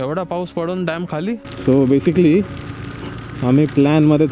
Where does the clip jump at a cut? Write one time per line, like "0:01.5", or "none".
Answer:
0:01.5